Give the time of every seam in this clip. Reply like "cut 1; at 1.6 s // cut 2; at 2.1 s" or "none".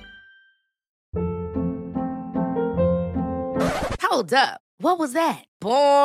cut 1; at 1.0 s